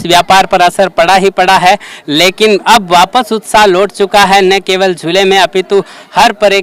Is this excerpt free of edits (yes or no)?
yes